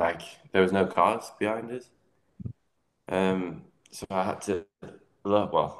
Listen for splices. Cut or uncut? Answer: uncut